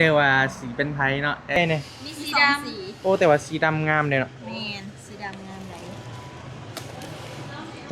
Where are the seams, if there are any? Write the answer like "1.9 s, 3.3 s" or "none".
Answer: 1.6 s